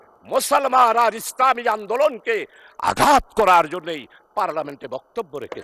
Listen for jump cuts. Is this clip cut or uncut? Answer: uncut